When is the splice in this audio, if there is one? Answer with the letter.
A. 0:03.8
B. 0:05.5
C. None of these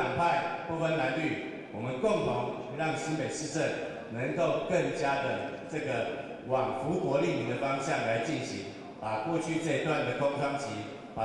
C